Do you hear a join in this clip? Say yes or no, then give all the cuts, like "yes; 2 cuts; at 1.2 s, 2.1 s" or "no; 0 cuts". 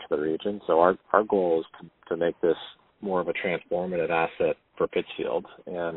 no; 0 cuts